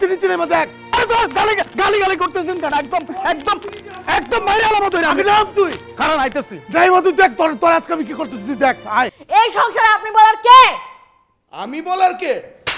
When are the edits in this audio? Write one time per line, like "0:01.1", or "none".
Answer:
0:09.2